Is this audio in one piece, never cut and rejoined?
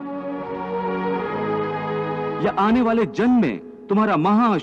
yes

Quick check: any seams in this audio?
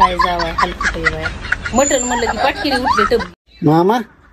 no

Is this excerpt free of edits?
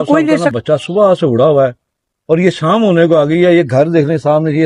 yes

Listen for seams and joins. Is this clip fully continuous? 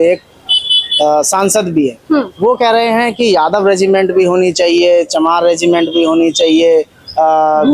yes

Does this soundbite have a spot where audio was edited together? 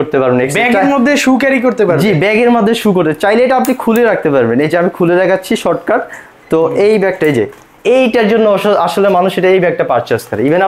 no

